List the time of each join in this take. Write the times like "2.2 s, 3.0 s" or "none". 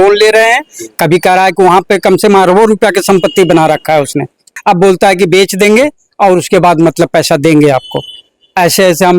4.5 s